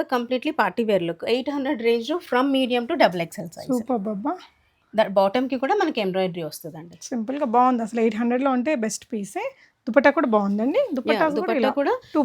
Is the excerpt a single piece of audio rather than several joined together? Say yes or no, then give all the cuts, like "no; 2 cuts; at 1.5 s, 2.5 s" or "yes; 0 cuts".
yes; 0 cuts